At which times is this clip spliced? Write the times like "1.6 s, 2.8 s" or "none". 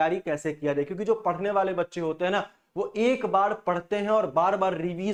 none